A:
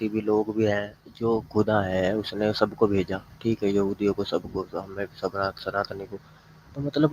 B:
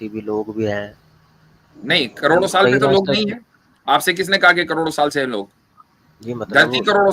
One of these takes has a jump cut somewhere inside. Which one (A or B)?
A